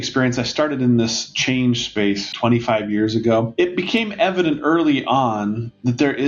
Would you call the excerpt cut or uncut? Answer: cut